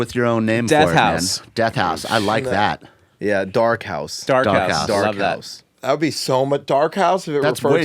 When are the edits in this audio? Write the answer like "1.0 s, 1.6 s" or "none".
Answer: none